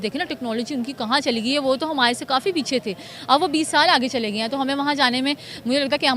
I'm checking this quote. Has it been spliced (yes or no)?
no